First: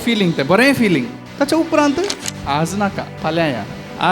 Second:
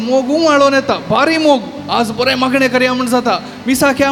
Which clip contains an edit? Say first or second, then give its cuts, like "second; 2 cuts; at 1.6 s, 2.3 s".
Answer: first; 3 cuts; at 1.2 s, 2.3 s, 3.1 s